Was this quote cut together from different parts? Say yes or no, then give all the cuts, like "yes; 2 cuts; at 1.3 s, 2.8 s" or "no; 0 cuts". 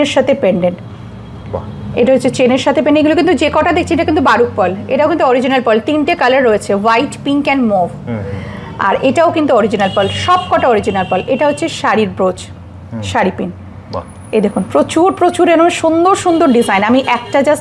no; 0 cuts